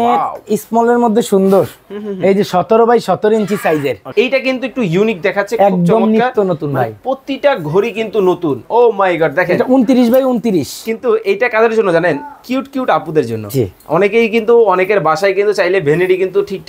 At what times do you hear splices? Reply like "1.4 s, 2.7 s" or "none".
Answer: 4.1 s, 8.6 s

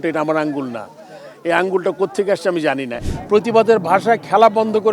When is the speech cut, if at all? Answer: 2.9 s

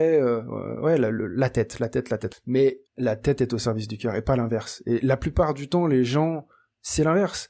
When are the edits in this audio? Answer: 2.3 s, 2.9 s

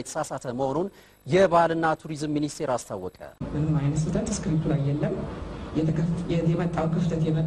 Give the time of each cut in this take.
3.5 s

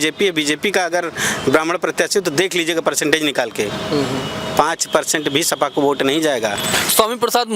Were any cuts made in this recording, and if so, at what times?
6.7 s

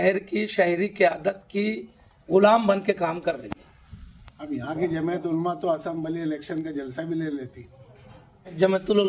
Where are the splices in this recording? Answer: none

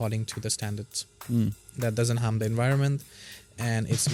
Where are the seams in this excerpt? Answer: none

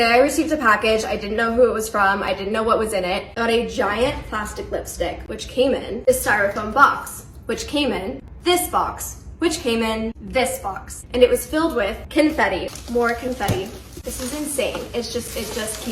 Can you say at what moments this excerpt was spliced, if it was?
3.3 s, 12.0 s

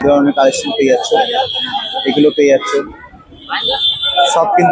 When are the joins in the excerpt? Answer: none

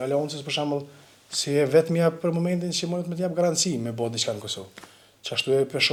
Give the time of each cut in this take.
none

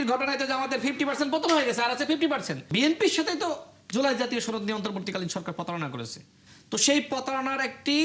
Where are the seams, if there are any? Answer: 2.7 s

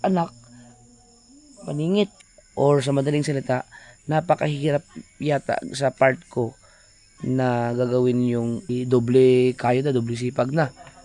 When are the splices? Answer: 2.3 s, 8.7 s

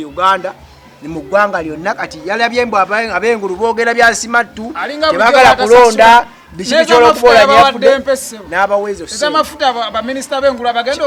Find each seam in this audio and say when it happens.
none

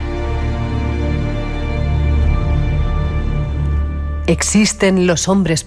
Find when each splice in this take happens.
1.2 s

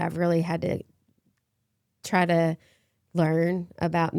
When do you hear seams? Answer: none

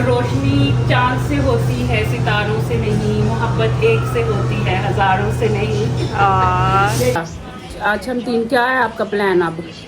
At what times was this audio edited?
7.2 s

